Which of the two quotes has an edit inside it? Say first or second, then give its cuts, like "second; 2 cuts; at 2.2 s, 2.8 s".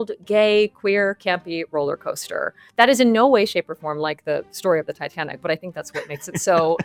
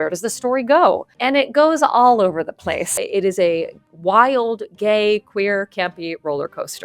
second; 2 cuts; at 1.1 s, 2.9 s